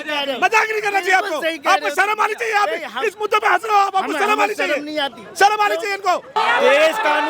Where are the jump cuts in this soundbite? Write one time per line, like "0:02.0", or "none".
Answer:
0:06.4